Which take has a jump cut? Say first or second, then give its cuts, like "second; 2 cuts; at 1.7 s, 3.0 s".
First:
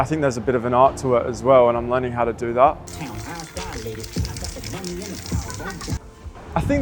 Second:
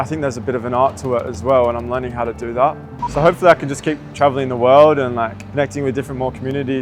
second; 2 cuts; at 2.9 s, 5.4 s